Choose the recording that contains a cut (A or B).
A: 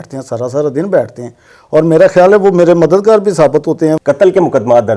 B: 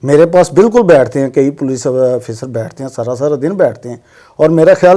A